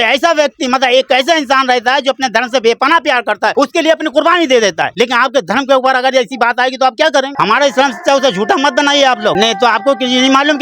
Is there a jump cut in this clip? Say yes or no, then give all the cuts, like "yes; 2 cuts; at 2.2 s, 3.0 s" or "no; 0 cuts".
yes; 3 cuts; at 4.9 s, 7.3 s, 9.3 s